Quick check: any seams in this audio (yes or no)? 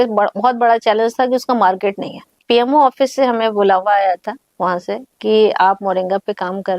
yes